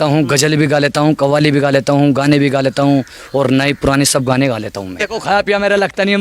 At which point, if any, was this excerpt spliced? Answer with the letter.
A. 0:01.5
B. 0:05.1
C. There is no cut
B